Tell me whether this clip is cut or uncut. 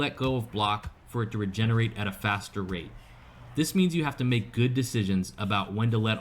cut